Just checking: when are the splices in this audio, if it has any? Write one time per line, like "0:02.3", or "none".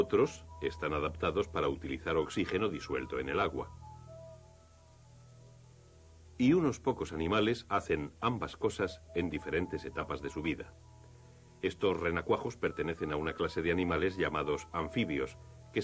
0:06.0